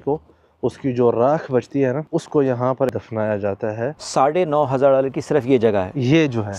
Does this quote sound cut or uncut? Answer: cut